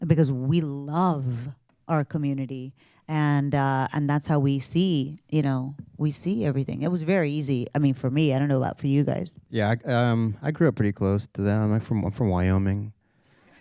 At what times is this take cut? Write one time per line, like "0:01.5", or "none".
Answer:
0:09.4